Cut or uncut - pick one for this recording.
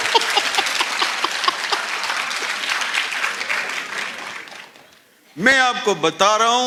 uncut